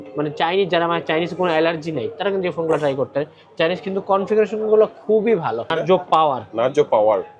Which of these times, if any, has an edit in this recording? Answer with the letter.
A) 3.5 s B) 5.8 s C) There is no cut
B